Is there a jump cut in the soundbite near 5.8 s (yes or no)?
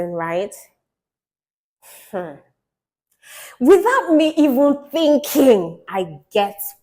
yes